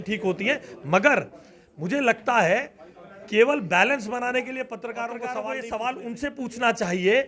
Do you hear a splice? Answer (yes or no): yes